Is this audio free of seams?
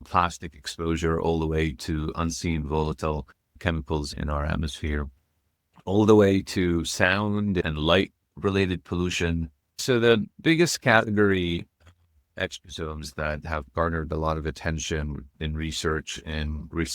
no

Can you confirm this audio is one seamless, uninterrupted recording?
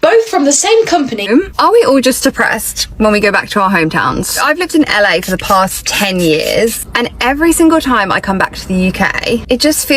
no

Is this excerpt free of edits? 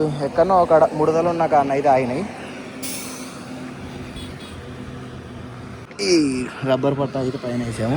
no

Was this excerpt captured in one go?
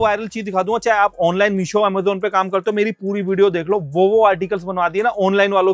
yes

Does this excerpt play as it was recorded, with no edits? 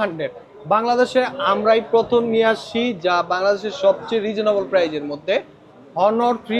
yes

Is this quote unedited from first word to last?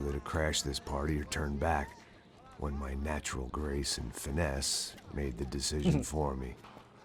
yes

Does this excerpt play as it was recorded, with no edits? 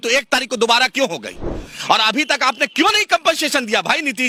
yes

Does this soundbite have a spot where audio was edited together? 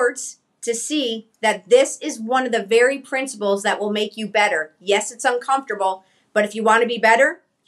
no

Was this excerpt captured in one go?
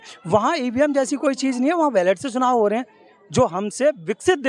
yes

